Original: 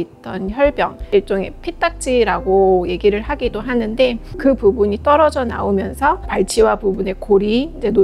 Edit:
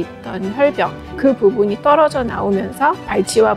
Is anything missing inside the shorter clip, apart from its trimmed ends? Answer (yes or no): yes